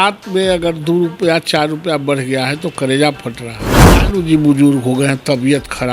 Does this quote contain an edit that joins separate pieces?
yes; 1 cut; at 4.0 s

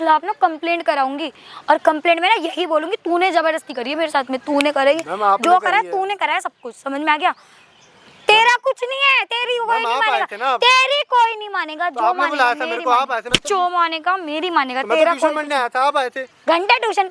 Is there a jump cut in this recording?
no; 0 cuts

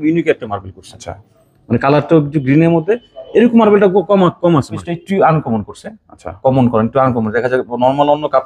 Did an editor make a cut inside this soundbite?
yes; 1 cut; at 4.9 s

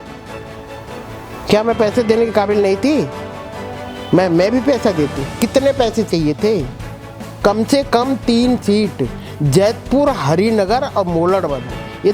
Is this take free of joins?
no; 1 cut; at 7.3 s

